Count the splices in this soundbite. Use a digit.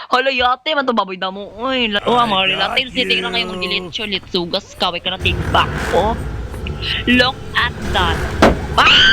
1